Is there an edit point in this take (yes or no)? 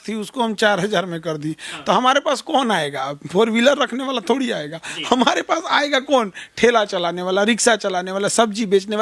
no